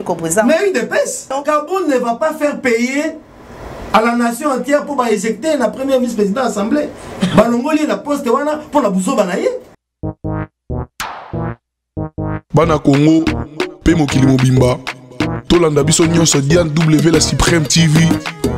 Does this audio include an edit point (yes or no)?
yes